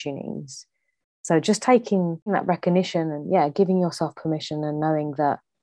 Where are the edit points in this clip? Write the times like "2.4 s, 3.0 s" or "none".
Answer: 2.3 s